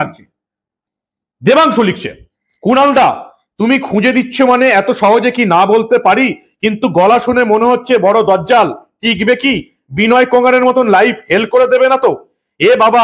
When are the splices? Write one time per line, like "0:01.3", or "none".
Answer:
0:01.3